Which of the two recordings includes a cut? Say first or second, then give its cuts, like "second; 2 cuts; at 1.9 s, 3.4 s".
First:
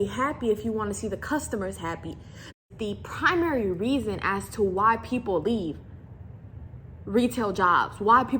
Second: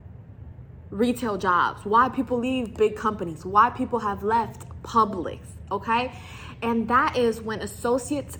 first; 1 cut; at 2.6 s